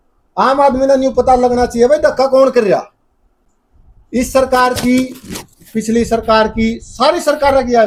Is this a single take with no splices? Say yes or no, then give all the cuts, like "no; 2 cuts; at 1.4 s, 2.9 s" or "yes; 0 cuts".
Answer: yes; 0 cuts